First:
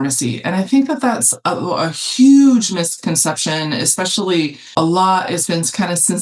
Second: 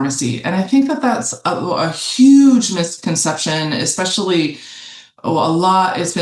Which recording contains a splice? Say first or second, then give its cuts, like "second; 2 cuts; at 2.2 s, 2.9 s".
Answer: first; 1 cut; at 4.8 s